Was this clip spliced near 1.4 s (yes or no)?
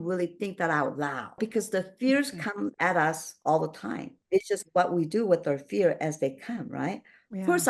yes